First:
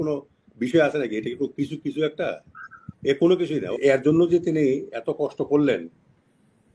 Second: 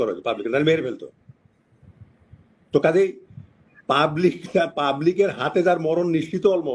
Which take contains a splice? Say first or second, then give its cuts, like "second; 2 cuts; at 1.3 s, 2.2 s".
first; 1 cut; at 3.8 s